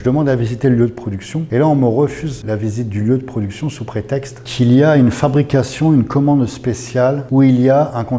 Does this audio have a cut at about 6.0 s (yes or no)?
no